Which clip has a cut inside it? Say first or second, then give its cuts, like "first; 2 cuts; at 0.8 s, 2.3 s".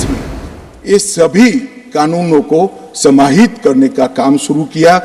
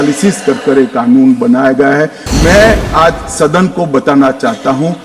second; 1 cut; at 2.2 s